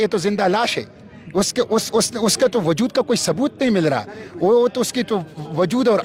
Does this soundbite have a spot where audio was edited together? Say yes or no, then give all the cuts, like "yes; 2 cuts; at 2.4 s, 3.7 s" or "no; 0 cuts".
no; 0 cuts